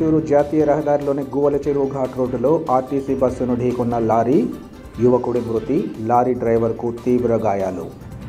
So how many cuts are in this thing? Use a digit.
0